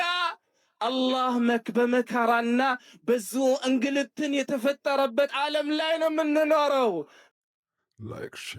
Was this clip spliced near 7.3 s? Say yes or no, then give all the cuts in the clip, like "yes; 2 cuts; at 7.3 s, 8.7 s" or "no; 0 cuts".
yes; 1 cut; at 7.3 s